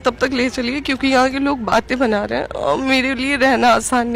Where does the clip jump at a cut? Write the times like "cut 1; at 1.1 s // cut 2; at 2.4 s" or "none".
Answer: none